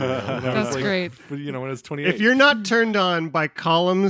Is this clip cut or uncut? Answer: cut